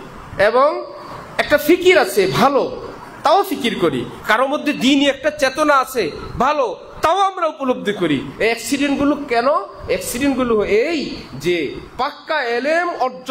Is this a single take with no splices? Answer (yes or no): yes